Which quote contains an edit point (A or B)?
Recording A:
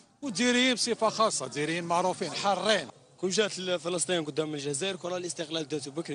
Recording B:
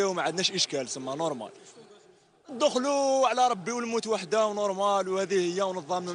A